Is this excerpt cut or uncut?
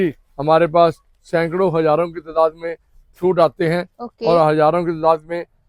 uncut